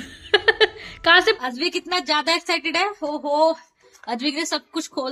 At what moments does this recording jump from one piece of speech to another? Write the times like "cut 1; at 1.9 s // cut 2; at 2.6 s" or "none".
cut 1; at 1.4 s